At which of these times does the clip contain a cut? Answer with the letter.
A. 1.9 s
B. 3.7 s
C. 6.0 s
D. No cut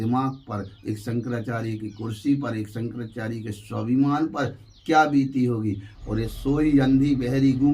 C